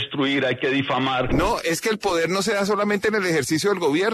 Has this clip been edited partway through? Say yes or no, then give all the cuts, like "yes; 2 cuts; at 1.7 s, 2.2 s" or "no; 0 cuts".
yes; 1 cut; at 1.3 s